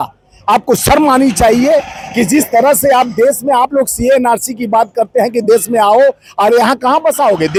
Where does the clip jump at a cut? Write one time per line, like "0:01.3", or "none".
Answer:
none